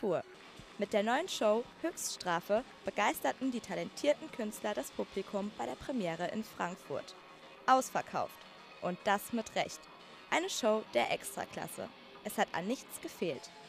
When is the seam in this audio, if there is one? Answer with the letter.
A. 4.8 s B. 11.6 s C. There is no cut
B